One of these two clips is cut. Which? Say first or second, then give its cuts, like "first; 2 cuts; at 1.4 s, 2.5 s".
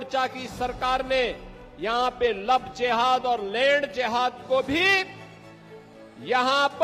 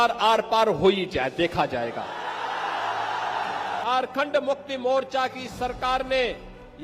second; 1 cut; at 3.9 s